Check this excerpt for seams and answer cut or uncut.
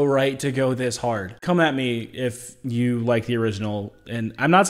cut